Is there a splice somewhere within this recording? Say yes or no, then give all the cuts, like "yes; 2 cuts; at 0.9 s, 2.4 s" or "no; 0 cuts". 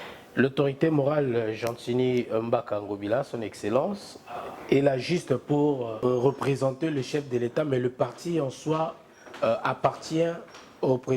yes; 1 cut; at 5.9 s